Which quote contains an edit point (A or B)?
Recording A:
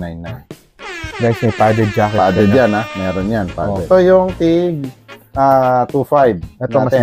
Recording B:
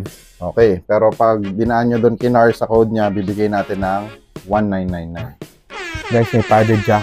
A